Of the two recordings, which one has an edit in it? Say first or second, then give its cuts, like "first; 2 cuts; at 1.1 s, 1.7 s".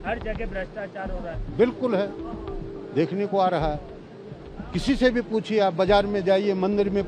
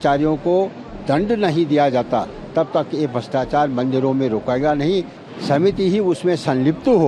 second; 1 cut; at 5.2 s